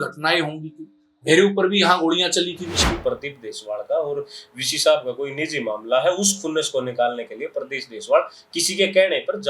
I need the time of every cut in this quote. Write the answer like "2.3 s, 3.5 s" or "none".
2.8 s